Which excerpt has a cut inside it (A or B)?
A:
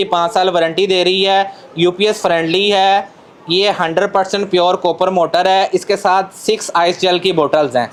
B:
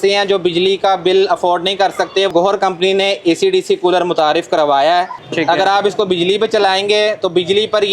B